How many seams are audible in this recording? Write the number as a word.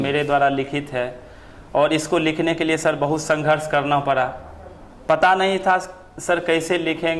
zero